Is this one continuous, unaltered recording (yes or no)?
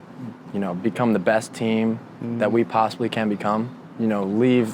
no